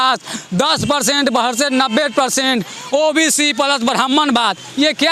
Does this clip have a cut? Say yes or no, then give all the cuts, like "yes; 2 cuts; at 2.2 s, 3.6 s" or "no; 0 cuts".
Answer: no; 0 cuts